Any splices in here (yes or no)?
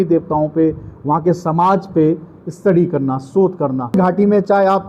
yes